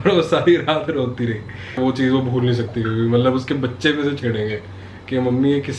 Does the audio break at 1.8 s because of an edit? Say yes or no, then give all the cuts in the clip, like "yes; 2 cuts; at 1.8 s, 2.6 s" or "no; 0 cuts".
yes; 1 cut; at 1.8 s